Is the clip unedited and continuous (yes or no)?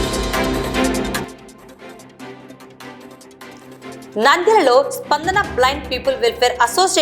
no